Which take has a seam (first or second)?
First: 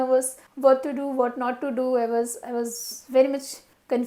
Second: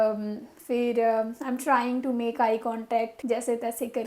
second